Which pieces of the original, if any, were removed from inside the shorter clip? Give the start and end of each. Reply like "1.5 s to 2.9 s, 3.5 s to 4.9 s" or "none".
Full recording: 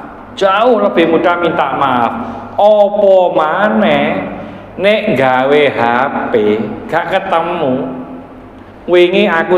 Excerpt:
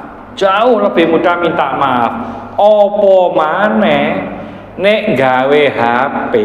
none